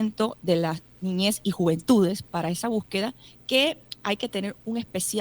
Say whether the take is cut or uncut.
cut